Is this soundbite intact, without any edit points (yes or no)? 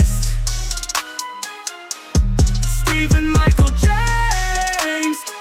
yes